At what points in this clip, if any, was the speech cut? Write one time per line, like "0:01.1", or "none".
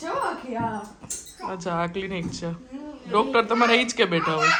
none